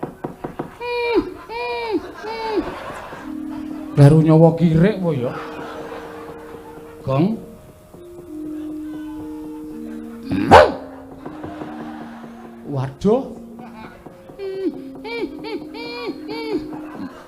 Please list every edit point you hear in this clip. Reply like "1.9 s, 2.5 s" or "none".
3.2 s